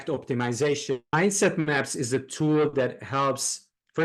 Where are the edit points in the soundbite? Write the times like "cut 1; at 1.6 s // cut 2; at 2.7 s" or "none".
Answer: cut 1; at 1.1 s

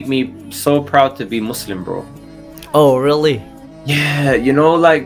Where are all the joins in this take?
none

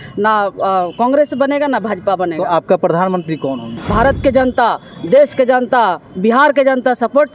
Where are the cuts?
cut 1; at 3.8 s

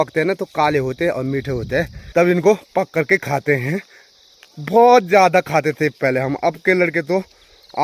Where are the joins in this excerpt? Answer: none

